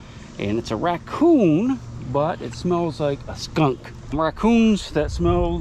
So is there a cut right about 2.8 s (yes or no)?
no